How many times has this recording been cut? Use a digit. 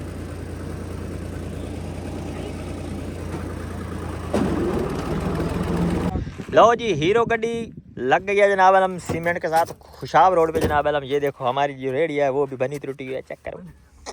1